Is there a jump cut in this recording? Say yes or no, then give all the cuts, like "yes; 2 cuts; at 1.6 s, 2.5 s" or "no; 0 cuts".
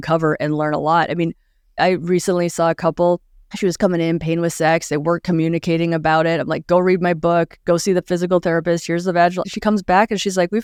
no; 0 cuts